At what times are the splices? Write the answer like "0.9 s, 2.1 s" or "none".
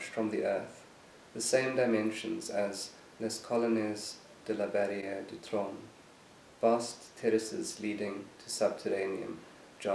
none